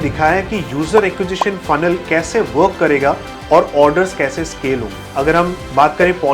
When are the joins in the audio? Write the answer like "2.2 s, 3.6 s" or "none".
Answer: 5.0 s